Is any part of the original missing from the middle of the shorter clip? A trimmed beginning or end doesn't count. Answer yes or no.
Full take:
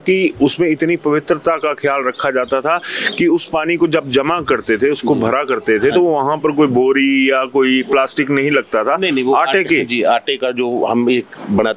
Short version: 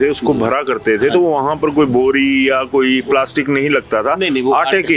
no